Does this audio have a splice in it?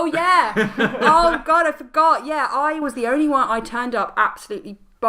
no; 0 cuts

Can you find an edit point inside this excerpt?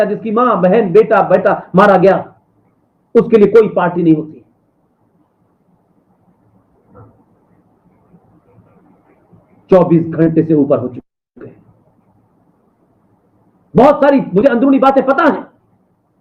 no; 0 cuts

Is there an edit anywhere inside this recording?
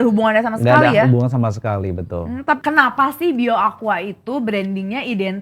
yes; 1 cut; at 2.6 s

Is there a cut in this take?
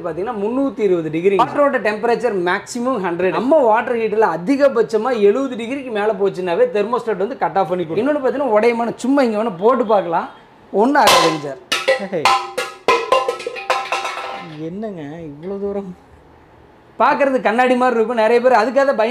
yes; 3 cuts; at 1.5 s, 3.4 s, 7.9 s

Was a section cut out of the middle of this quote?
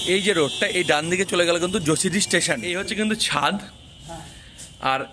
yes; 1 cut; at 2.7 s

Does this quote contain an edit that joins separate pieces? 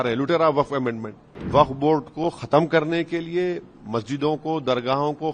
yes; 1 cut; at 1.4 s

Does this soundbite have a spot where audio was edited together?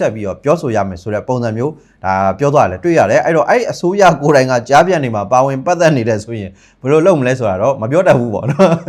no; 0 cuts

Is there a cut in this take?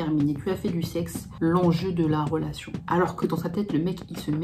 yes; 2 cuts; at 1.2 s, 2.9 s

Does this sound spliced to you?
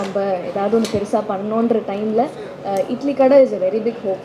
no; 0 cuts

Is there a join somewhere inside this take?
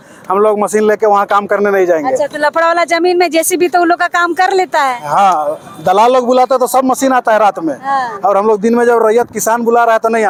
no; 0 cuts

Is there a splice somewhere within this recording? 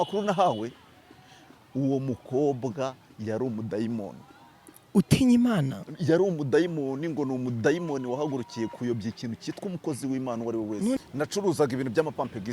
yes; 1 cut; at 11.0 s

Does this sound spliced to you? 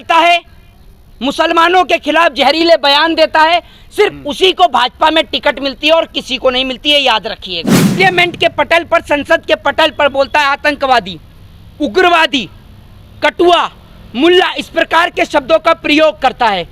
yes; 1 cut; at 7.9 s

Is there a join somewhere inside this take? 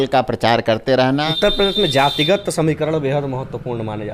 yes; 1 cut; at 1.3 s

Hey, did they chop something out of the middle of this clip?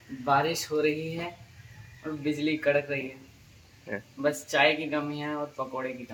no; 0 cuts

